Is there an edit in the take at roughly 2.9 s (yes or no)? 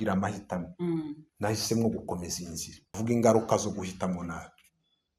yes